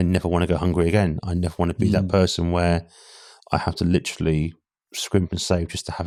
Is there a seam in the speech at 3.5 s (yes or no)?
no